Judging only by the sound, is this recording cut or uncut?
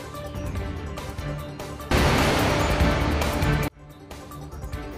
uncut